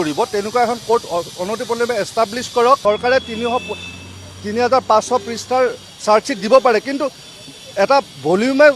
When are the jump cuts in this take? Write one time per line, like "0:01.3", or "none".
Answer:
0:02.8